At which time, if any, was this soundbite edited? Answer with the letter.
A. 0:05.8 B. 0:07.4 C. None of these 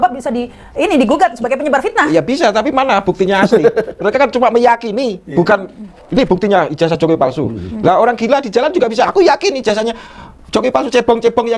C